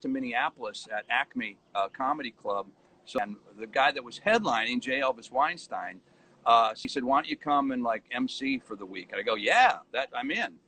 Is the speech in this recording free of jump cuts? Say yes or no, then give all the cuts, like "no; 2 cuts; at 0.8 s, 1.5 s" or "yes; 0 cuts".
no; 2 cuts; at 3.2 s, 6.9 s